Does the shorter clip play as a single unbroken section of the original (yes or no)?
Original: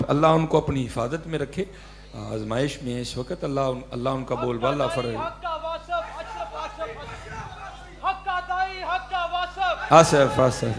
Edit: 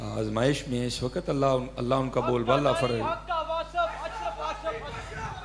yes